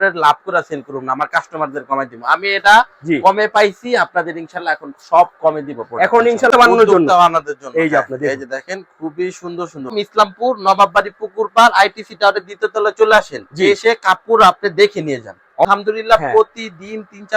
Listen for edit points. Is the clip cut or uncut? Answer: cut